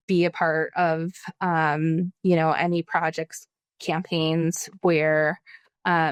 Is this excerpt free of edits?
yes; 0 cuts

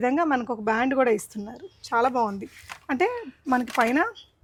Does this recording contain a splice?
no; 0 cuts

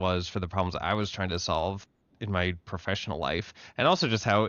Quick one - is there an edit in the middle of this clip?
no; 0 cuts

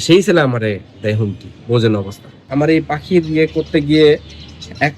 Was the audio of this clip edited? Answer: yes; 1 cut; at 2.4 s

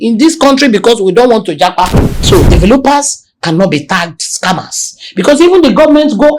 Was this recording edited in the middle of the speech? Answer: yes; 1 cut; at 2.2 s

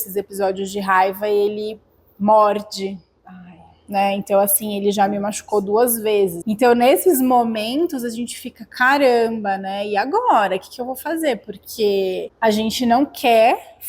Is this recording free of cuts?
no; 2 cuts; at 6.4 s, 12.3 s

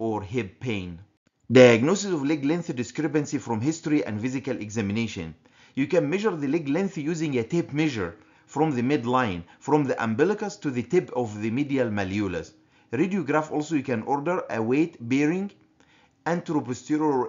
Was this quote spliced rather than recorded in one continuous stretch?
no; 0 cuts

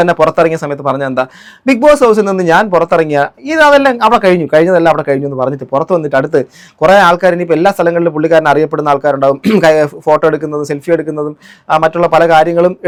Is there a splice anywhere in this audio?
no; 0 cuts

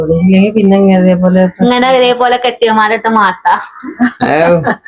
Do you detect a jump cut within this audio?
no; 0 cuts

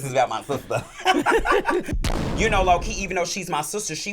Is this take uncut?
no; 1 cut; at 1.9 s

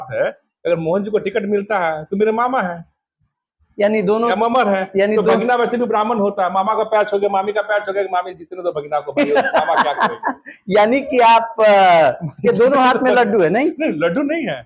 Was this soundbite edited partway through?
no; 0 cuts

